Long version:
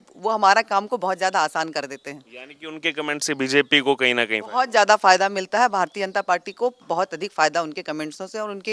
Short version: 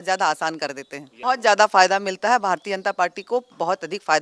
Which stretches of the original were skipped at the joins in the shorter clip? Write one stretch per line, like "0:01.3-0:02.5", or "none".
0:02.2-0:04.4